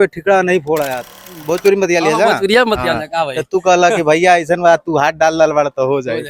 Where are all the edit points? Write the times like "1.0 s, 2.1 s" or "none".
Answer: 1.0 s